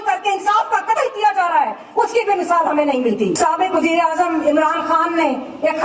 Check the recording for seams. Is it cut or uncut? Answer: cut